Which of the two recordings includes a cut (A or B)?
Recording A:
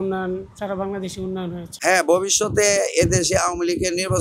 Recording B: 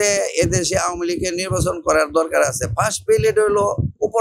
A